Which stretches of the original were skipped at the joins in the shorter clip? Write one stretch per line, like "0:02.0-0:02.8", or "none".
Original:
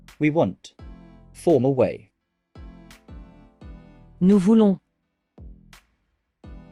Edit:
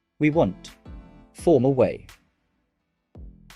0:02.6-0:04.8